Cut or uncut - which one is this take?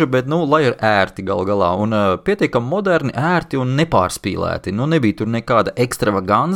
uncut